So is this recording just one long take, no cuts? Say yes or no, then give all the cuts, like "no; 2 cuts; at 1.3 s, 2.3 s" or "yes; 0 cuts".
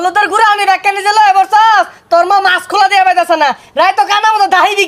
yes; 0 cuts